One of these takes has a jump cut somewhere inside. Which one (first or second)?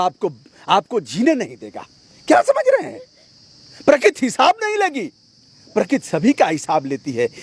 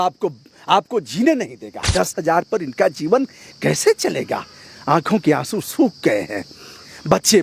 second